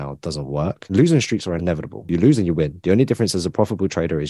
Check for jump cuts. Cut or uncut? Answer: cut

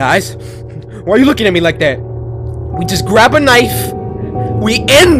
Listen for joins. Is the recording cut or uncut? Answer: uncut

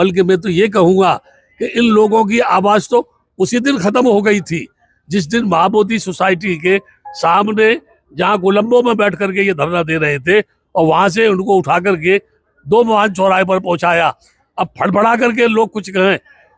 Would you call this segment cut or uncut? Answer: uncut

